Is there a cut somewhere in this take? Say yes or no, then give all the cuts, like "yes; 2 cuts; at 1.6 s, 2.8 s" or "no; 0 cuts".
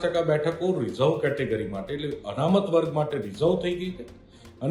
no; 0 cuts